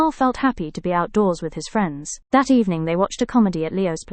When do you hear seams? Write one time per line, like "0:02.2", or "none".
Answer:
none